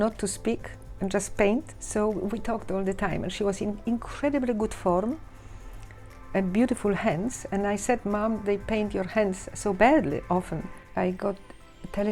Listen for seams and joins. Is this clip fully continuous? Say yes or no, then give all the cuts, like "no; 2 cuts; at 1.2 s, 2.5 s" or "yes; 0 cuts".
no; 2 cuts; at 1.8 s, 10.8 s